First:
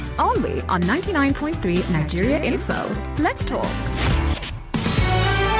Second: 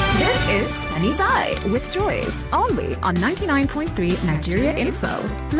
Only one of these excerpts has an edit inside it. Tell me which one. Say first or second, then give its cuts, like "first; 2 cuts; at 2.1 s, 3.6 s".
first; 1 cut; at 4.6 s